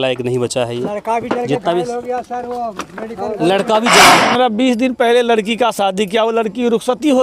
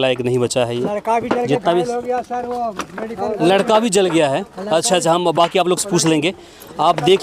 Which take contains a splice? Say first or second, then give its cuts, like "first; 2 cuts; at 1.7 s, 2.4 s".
first; 1 cut; at 4.1 s